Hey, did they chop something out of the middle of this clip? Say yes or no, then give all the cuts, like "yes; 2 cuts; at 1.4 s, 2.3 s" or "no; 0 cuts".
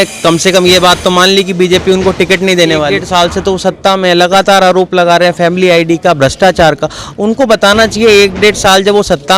yes; 1 cut; at 3.0 s